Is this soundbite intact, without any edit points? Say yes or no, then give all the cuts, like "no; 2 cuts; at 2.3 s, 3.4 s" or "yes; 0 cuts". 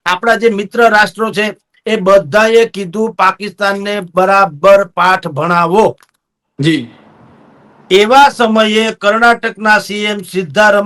yes; 0 cuts